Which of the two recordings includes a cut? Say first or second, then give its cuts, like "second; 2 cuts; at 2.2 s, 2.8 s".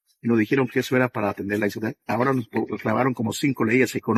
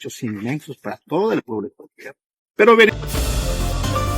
second; 1 cut; at 3.0 s